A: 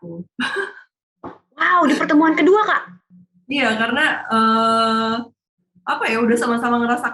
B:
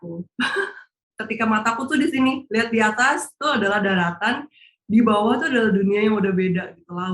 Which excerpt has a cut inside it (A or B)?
B